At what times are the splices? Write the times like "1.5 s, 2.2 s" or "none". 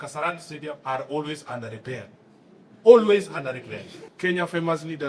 4.0 s